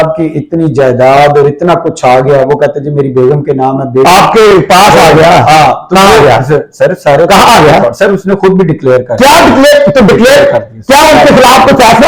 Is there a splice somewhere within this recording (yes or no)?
no